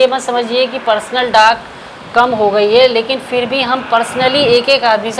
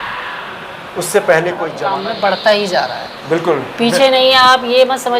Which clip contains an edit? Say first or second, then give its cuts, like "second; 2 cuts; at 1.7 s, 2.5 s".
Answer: second; 1 cut; at 1.7 s